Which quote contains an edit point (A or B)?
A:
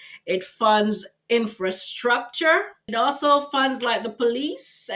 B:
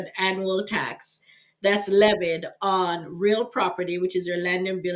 A